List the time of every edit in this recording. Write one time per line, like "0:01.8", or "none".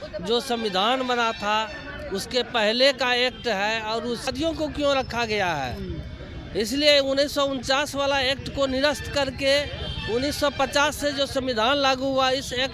0:04.3